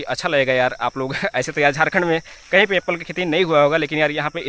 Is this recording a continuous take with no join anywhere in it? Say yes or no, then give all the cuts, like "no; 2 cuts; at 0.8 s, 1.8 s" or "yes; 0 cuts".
yes; 0 cuts